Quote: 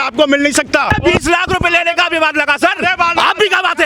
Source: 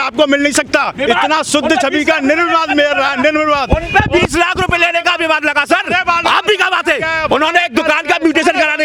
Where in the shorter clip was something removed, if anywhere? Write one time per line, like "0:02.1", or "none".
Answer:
0:01.0